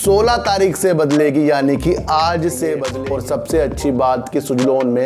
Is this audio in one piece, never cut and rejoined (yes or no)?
no